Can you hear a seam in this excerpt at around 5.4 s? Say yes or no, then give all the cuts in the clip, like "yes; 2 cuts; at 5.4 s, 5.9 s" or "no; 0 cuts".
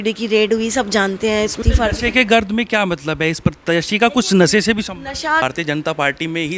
yes; 2 cuts; at 1.6 s, 5.4 s